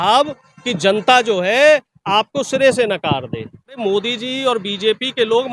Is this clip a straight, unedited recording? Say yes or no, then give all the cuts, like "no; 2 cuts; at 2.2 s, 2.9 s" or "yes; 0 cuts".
no; 1 cut; at 3.8 s